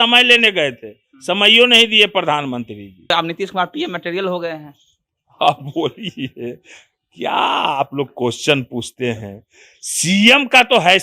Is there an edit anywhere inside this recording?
yes; 1 cut; at 3.1 s

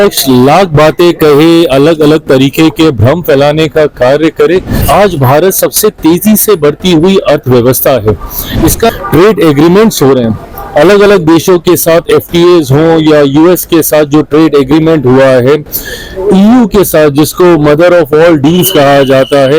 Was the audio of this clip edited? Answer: yes; 2 cuts; at 4.7 s, 8.9 s

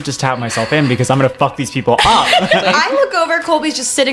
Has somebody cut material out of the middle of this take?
yes; 1 cut; at 2.7 s

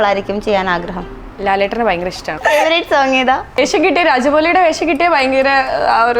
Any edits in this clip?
yes; 2 cuts; at 2.4 s, 3.6 s

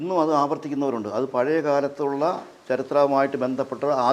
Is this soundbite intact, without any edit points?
yes; 0 cuts

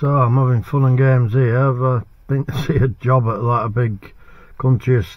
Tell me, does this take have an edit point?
no; 0 cuts

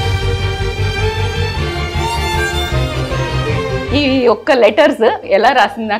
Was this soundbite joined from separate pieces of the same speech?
yes; 2 cuts; at 3.6 s, 5.2 s

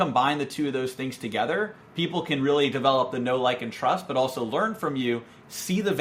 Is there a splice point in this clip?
no; 0 cuts

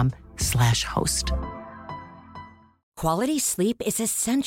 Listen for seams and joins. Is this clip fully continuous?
no; 1 cut; at 2.8 s

